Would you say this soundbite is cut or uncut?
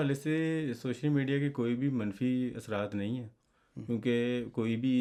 uncut